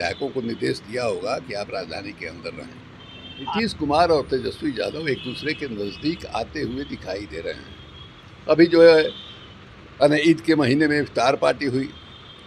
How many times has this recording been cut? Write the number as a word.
one